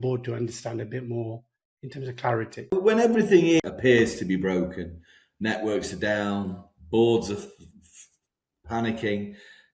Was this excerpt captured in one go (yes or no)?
no